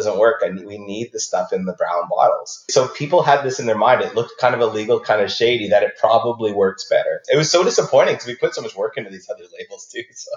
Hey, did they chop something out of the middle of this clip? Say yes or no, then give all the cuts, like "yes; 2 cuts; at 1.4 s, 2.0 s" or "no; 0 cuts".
yes; 2 cuts; at 2.7 s, 7.2 s